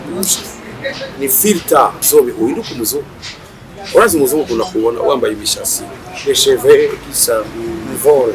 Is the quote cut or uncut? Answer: cut